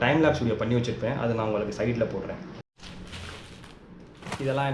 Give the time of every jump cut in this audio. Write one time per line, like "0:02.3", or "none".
none